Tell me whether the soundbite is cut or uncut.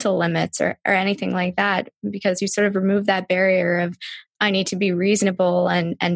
uncut